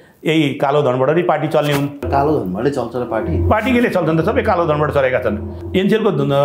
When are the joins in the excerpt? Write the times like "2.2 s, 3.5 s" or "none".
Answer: 2.1 s, 5.5 s

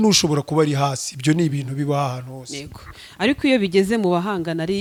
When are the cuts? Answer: none

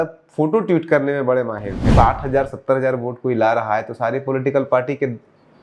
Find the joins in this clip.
1.8 s

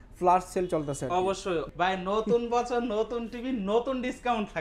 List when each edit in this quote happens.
1.7 s

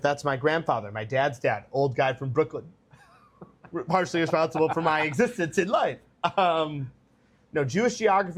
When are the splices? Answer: none

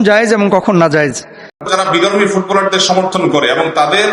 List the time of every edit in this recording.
1.6 s

